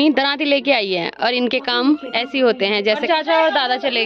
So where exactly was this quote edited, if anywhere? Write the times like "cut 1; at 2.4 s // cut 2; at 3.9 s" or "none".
cut 1; at 3.0 s